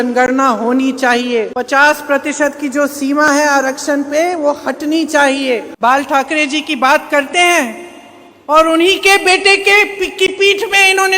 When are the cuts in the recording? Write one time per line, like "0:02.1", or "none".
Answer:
0:01.5
0:05.7